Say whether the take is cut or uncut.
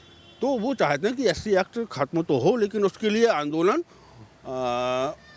uncut